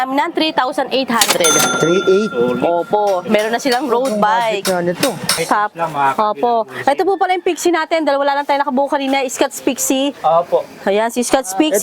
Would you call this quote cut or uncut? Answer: cut